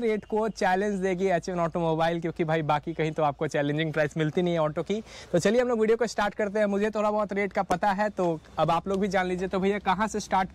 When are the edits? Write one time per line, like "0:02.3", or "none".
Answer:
none